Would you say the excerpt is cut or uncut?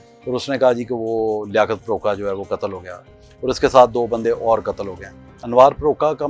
cut